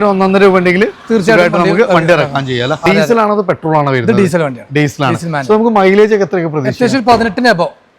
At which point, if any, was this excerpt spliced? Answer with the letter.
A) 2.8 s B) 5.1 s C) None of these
A